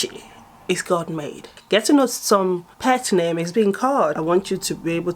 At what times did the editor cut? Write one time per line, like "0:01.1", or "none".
0:01.5
0:04.2